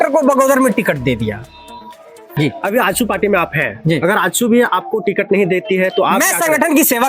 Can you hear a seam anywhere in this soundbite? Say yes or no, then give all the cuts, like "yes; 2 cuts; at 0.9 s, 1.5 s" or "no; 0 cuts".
yes; 1 cut; at 2.3 s